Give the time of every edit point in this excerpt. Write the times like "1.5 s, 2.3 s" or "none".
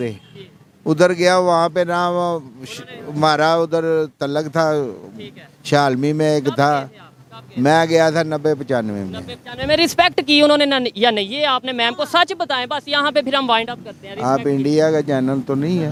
none